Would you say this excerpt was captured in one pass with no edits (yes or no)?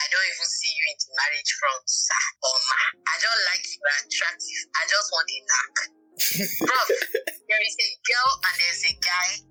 yes